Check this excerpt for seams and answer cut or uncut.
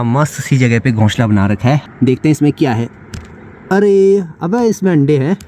cut